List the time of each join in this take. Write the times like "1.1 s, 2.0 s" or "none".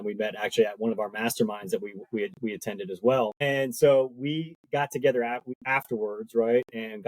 3.4 s, 5.5 s